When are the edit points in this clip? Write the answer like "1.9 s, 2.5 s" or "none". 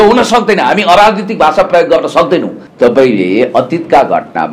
2.6 s